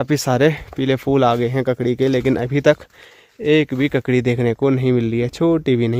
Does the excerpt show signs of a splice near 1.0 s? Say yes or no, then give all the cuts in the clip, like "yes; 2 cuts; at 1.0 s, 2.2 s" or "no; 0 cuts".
no; 0 cuts